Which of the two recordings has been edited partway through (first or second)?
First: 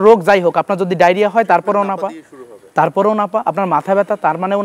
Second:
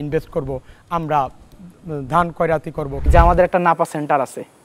second